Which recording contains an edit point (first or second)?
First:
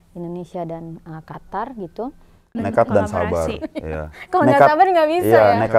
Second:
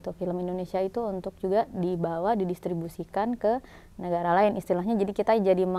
first